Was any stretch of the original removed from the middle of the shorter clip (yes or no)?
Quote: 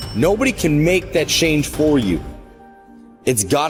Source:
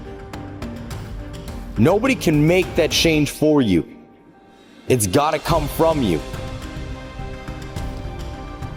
no